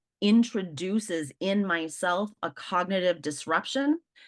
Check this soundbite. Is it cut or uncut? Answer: uncut